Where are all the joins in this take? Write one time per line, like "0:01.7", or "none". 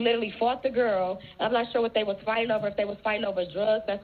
none